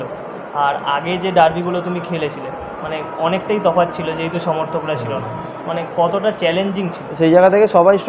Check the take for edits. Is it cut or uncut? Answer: cut